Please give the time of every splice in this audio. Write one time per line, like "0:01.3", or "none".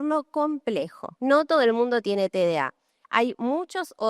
0:01.1